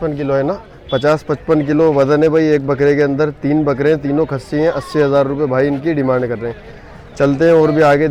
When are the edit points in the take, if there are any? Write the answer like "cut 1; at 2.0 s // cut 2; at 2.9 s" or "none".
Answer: none